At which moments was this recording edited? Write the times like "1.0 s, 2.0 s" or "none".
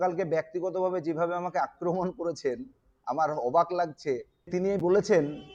4.5 s